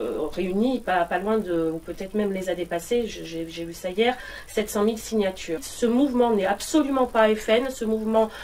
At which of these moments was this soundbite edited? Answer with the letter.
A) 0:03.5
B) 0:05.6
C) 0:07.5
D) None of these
B